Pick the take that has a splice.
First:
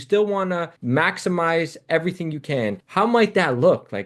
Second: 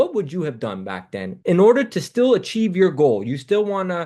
first; 1 cut; at 2.8 s

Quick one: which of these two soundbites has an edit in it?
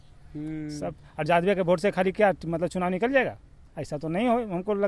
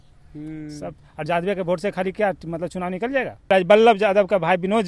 second; 1 cut; at 3.5 s

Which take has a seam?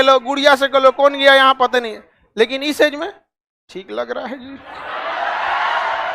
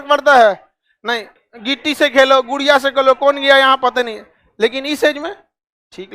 second; 1 cut; at 1.3 s

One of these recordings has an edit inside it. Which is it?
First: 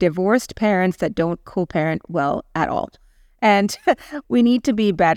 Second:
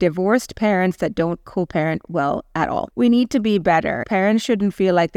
second; 2 cuts; at 2.9 s, 4.0 s

